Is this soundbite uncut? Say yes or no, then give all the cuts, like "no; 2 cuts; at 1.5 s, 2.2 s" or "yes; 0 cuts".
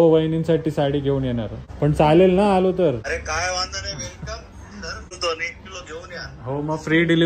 no; 3 cuts; at 1.6 s, 3.1 s, 5.2 s